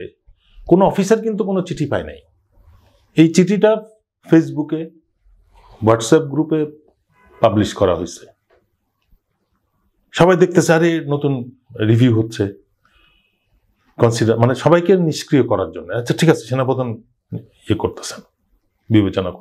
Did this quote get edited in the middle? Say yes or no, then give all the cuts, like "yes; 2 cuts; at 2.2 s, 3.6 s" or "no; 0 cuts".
no; 0 cuts